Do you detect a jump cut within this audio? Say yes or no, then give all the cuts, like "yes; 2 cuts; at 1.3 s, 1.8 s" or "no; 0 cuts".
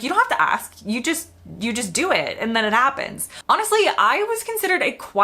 yes; 1 cut; at 3.4 s